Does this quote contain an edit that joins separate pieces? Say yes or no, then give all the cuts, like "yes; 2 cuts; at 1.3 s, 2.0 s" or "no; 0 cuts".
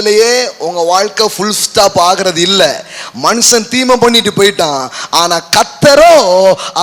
no; 0 cuts